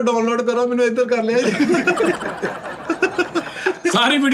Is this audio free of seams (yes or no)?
yes